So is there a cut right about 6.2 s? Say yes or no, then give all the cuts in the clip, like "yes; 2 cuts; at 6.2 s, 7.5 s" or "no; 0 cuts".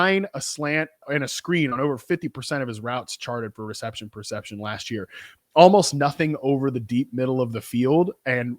no; 1 cut; at 1.1 s